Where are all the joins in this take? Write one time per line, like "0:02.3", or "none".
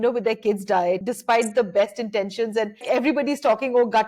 0:01.0
0:02.8